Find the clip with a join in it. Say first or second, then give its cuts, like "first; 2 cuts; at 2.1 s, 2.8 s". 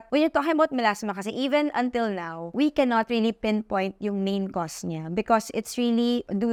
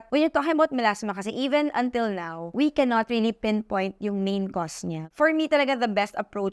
second; 1 cut; at 5.1 s